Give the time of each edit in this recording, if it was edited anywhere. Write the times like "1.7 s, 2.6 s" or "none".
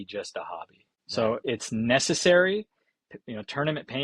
1.4 s

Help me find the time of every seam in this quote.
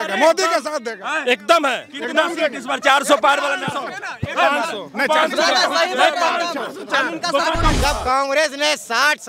7.7 s

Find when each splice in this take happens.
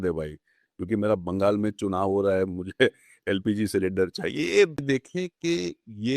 4.8 s

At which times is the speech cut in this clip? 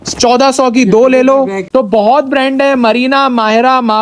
1.6 s

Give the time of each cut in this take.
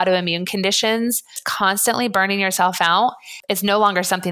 1.4 s, 3.3 s

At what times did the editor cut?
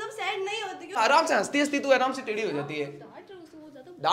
1.0 s

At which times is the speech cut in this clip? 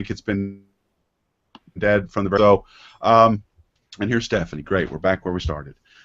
2.6 s

